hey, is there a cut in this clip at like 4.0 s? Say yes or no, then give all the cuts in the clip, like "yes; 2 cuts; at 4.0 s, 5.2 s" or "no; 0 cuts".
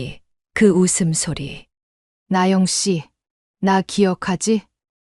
no; 1 cut; at 2.1 s